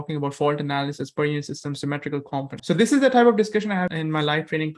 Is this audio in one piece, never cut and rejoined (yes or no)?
no